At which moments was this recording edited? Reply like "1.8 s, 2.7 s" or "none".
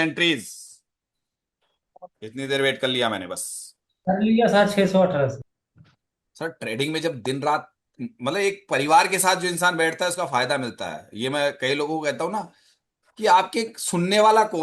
5.4 s